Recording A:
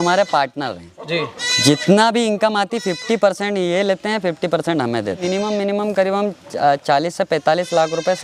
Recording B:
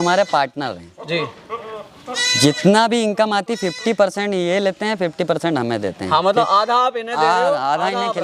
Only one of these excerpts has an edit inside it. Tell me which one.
A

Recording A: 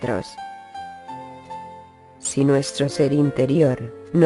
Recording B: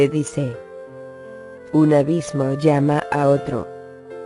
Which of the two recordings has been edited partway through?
B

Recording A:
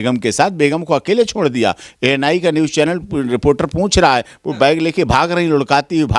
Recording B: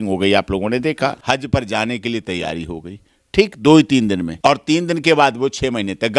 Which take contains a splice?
B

